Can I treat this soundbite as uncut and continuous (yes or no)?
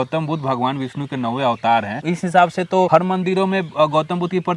no